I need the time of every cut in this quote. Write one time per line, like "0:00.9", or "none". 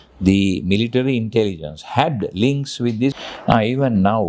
0:03.2